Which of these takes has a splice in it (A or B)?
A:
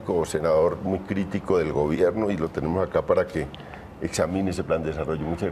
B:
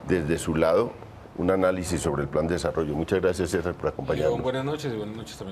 B